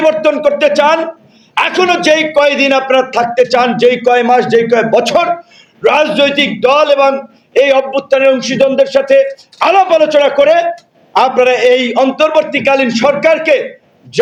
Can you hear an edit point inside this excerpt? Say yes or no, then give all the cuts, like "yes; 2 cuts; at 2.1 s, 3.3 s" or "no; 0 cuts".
no; 0 cuts